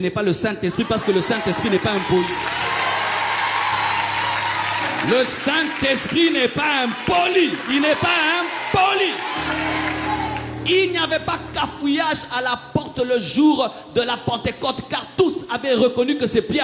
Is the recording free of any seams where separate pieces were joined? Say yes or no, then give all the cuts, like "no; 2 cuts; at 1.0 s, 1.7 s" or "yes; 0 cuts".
yes; 0 cuts